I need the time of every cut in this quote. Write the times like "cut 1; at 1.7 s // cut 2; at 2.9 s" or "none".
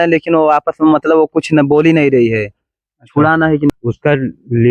cut 1; at 3.7 s